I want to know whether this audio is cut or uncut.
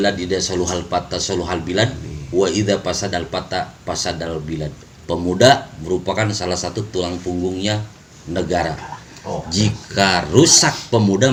uncut